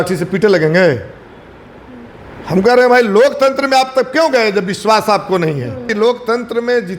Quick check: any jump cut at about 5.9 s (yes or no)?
yes